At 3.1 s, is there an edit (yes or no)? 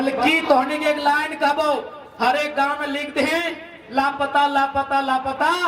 no